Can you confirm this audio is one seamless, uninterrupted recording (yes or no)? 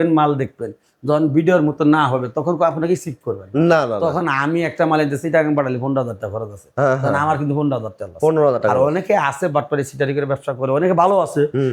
yes